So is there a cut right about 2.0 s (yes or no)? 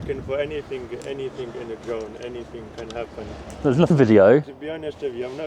no